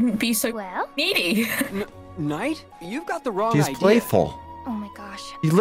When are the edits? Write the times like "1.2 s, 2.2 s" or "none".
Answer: 2.7 s